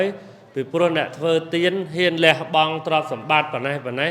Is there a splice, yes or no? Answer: no